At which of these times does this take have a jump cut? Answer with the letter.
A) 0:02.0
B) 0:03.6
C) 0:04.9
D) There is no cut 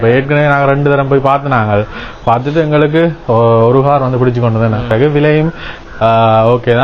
C